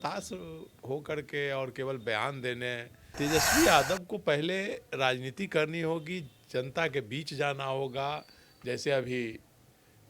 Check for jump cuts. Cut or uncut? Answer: cut